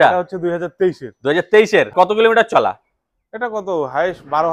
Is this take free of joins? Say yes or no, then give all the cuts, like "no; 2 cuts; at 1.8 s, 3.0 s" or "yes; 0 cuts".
no; 1 cut; at 1.9 s